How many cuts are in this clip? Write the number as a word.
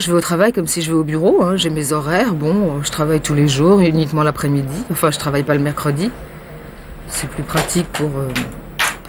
zero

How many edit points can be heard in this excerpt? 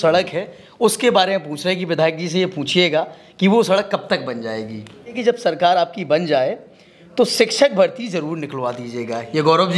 one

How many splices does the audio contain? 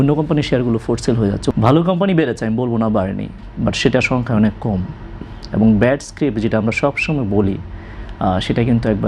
one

